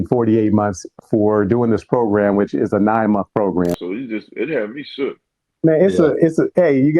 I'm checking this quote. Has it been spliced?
yes; 1 cut; at 3.8 s

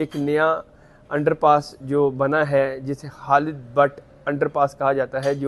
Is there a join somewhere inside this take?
no; 0 cuts

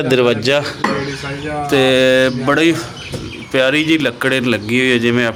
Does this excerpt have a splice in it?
no; 0 cuts

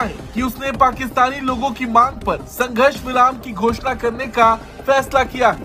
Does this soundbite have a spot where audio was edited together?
no; 0 cuts

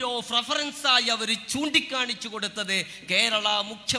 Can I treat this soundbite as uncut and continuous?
yes; 0 cuts

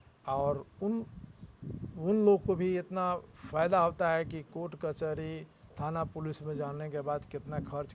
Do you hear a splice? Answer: no; 0 cuts

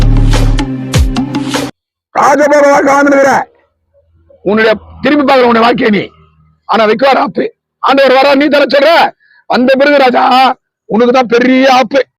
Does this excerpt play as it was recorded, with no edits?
no; 1 cut; at 1.7 s

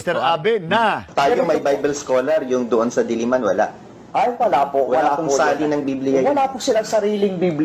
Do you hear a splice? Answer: no; 0 cuts

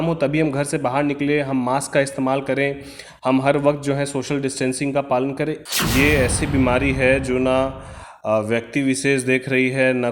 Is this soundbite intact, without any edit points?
no; 1 cut; at 5.6 s

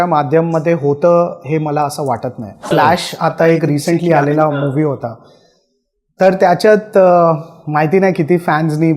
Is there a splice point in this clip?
yes; 1 cut; at 2.7 s

